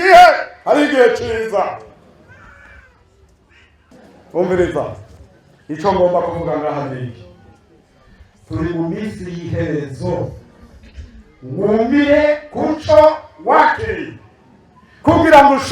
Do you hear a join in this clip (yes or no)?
yes